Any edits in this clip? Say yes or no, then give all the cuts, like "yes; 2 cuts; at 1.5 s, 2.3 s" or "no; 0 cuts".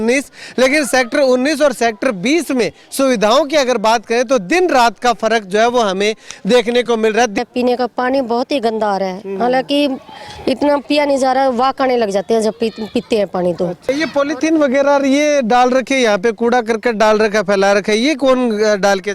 yes; 2 cuts; at 7.4 s, 13.9 s